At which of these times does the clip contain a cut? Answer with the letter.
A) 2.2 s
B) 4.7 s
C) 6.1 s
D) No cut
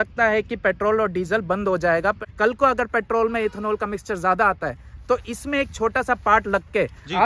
A